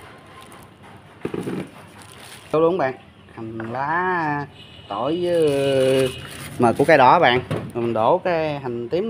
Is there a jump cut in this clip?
yes; 2 cuts; at 2.5 s, 7.7 s

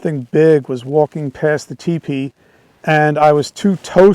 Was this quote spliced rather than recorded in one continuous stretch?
no; 0 cuts

